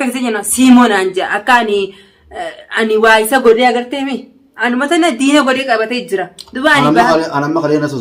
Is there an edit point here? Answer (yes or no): no